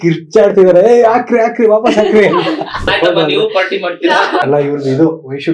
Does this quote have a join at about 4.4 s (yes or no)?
yes